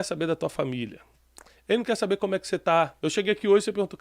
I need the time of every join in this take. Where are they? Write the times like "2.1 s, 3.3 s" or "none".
2.9 s